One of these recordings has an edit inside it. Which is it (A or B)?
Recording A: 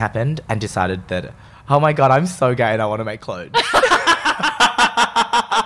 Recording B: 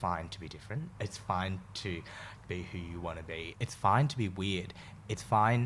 B